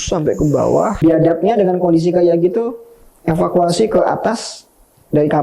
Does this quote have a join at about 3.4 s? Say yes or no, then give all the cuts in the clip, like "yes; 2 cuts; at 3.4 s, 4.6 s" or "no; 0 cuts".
no; 1 cut; at 1.0 s